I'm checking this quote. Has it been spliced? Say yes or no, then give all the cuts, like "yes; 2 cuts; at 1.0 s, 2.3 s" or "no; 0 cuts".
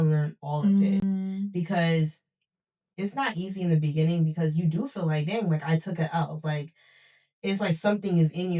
no; 0 cuts